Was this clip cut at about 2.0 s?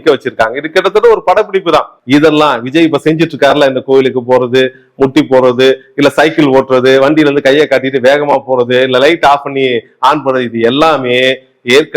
yes; 1 cut; at 2.0 s

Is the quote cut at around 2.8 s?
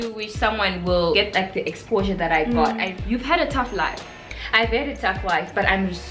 yes; 2 cuts; at 1.2 s, 2.8 s

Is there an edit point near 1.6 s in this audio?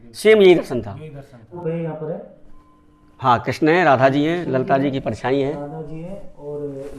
yes; 1 cut; at 1.6 s

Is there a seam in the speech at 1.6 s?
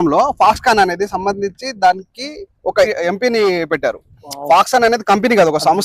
no; 1 cut; at 2.9 s

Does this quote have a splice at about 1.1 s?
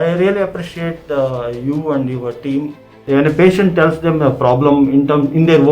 no; 1 cut; at 3.0 s

